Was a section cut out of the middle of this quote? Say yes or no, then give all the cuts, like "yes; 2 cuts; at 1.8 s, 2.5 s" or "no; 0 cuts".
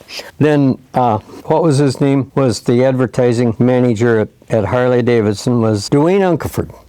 yes; 4 cuts; at 1.3 s, 2.3 s, 3.5 s, 5.8 s